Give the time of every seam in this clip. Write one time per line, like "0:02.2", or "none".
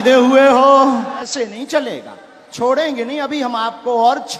0:01.3